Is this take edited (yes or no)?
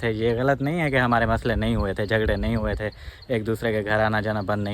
no